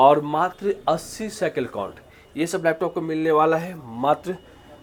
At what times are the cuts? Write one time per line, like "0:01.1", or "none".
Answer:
none